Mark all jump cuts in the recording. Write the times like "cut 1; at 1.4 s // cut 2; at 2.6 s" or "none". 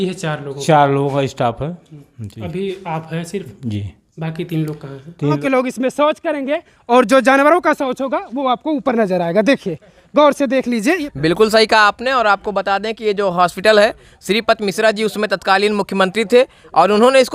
cut 1; at 5.3 s // cut 2; at 11.1 s